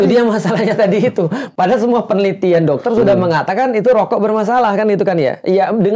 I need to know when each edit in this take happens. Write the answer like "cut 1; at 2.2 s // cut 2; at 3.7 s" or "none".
none